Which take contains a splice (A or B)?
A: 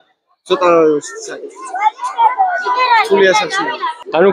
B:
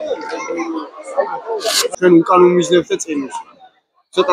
B